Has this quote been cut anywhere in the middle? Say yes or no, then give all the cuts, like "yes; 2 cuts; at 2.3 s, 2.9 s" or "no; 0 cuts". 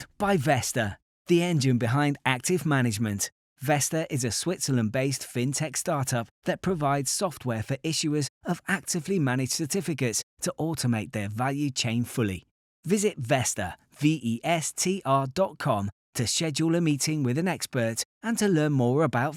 no; 0 cuts